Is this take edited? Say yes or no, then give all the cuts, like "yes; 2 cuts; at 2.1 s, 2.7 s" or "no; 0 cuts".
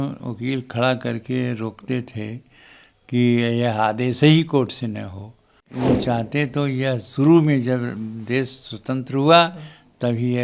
yes; 1 cut; at 5.7 s